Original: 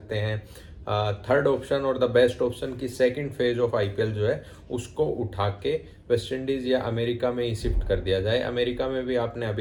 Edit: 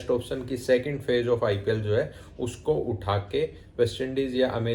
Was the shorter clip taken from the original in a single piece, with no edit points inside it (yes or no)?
yes